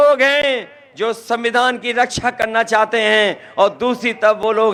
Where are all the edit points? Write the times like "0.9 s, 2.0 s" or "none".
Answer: none